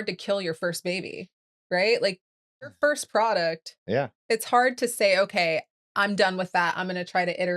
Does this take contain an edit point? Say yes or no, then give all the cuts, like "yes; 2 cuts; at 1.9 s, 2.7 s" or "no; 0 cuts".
yes; 1 cut; at 4.2 s